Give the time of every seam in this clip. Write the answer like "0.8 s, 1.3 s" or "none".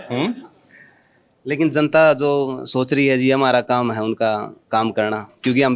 none